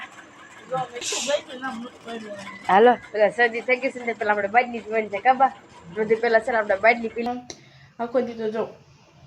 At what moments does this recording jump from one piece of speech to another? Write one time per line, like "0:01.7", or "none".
0:01.0
0:07.3